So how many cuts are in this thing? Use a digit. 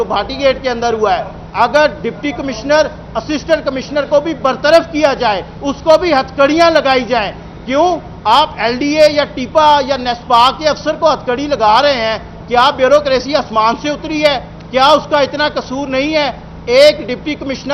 0